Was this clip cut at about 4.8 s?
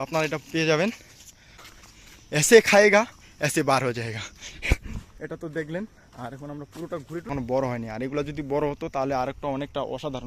no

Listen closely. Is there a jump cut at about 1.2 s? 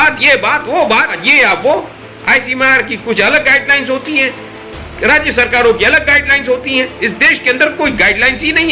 yes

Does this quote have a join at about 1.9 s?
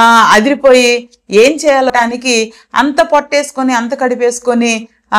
yes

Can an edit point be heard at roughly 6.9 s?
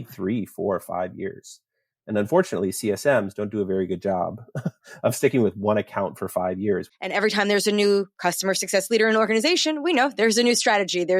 yes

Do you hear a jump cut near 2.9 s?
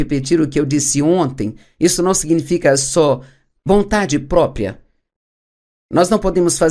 yes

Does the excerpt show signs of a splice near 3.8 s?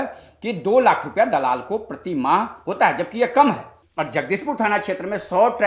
yes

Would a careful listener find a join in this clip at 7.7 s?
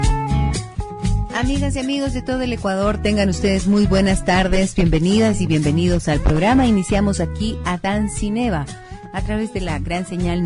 no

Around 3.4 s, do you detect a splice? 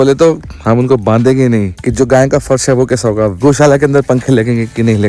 yes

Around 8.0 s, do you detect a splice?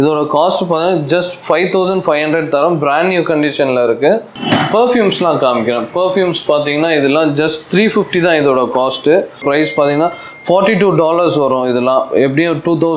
no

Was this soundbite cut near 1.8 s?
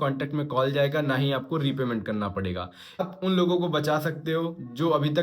no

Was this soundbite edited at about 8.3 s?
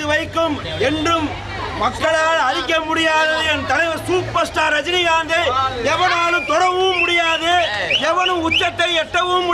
no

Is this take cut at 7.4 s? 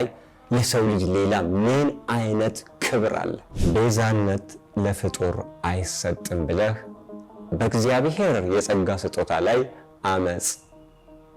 no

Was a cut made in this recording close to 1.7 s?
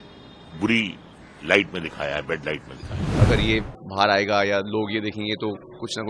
no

